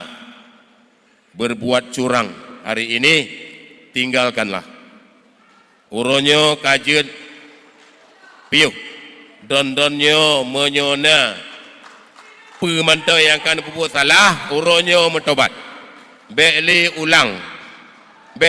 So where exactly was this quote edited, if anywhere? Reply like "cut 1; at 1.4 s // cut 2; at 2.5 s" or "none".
none